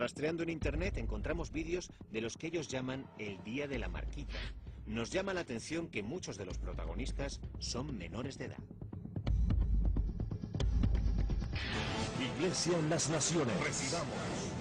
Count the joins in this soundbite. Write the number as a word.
one